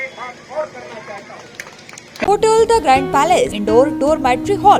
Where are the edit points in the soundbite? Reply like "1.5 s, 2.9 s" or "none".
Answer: 2.2 s, 3.6 s